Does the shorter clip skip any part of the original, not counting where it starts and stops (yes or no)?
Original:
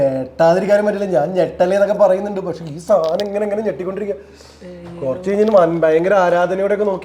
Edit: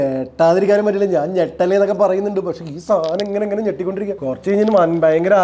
yes